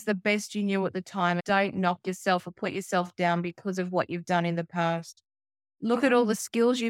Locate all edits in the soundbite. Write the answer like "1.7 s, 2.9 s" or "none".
1.4 s